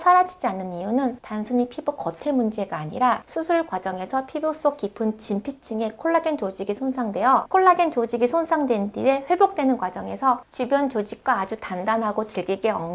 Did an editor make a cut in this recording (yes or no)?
no